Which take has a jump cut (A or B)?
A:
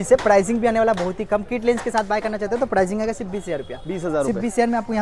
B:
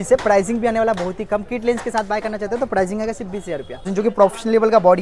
B